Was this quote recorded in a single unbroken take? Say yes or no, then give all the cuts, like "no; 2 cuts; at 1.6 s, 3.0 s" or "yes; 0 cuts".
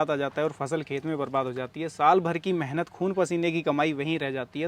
yes; 0 cuts